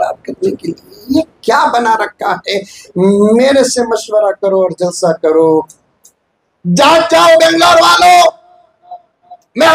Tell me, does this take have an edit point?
no; 0 cuts

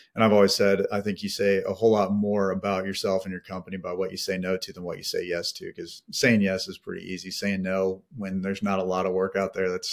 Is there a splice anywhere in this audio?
no; 0 cuts

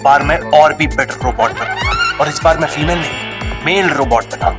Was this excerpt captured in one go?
yes; 0 cuts

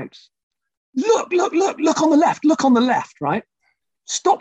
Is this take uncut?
yes; 0 cuts

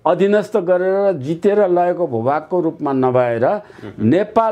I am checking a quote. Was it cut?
no; 0 cuts

